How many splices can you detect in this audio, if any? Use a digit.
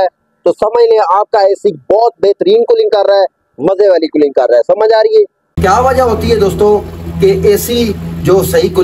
1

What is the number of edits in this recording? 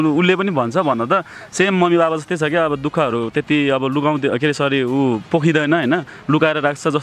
0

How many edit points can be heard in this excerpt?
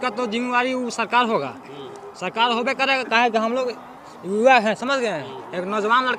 0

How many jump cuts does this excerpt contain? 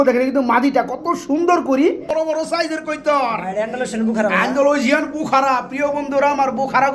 1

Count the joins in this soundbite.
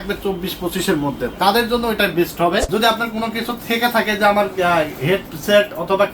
1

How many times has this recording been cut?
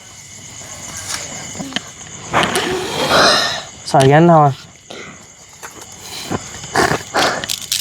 1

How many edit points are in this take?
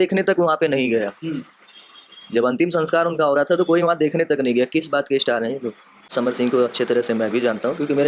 1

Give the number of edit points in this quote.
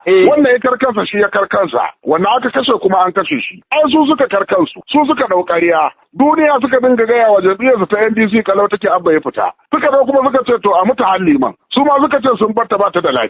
1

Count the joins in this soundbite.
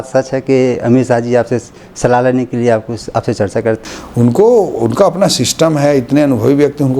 1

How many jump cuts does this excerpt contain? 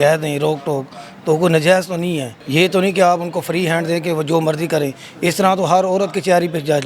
1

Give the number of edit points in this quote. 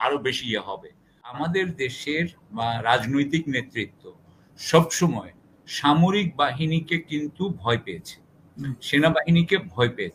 1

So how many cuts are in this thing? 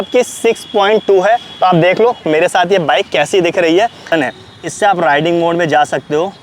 1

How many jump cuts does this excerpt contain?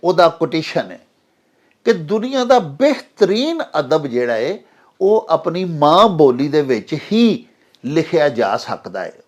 0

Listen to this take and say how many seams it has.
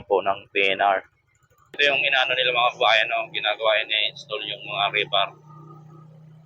1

